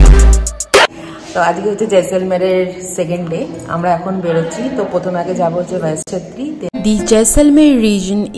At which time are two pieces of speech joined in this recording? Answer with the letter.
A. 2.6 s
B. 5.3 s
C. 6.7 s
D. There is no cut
C